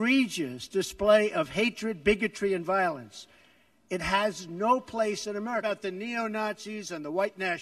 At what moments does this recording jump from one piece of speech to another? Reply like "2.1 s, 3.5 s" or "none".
5.6 s